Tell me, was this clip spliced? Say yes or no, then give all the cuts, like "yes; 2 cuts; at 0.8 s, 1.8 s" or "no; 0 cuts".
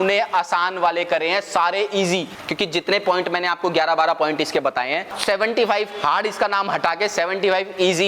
yes; 2 cuts; at 2.4 s, 5.1 s